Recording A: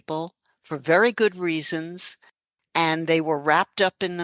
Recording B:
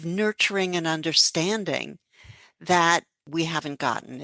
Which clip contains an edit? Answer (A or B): B